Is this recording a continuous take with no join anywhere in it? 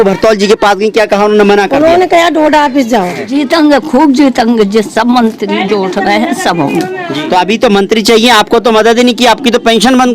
no; 2 cuts; at 3.2 s, 7.0 s

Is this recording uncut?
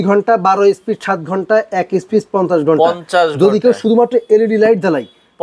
yes; 0 cuts

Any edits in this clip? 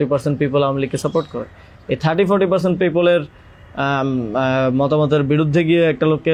no; 0 cuts

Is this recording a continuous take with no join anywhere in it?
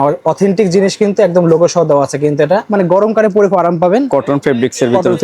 no; 1 cut; at 2.7 s

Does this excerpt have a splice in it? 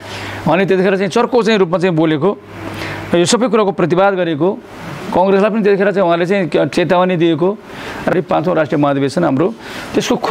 yes; 2 cuts; at 6.7 s, 8.1 s

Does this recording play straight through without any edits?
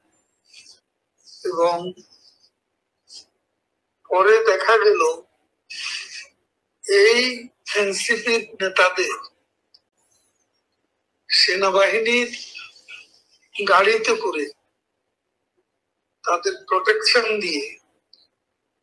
no; 1 cut; at 12.2 s

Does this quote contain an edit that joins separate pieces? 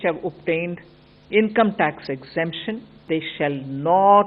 yes; 1 cut; at 3.0 s

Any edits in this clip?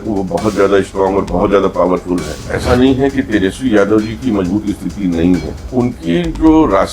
yes; 2 cuts; at 2.5 s, 5.7 s

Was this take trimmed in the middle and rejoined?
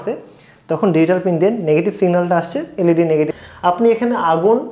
yes; 1 cut; at 3.3 s

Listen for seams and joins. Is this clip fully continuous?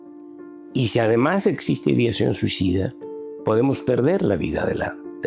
yes; 0 cuts

